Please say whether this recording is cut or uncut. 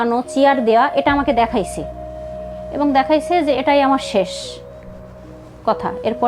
uncut